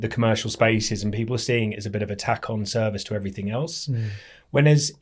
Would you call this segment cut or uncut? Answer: uncut